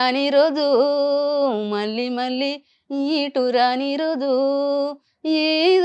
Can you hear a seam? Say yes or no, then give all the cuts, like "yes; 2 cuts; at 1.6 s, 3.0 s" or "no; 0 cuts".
no; 0 cuts